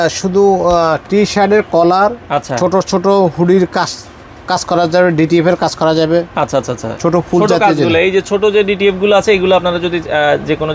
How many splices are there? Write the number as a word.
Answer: zero